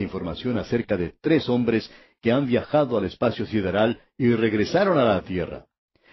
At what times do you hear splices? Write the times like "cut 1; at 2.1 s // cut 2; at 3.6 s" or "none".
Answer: cut 1; at 3.5 s